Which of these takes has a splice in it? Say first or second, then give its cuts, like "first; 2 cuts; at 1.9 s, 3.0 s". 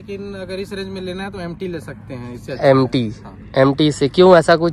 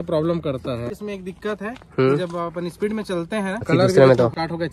second; 2 cuts; at 1.0 s, 3.7 s